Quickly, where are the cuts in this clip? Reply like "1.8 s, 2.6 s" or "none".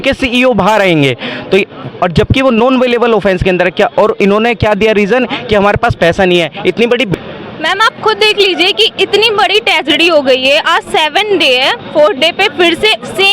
7.1 s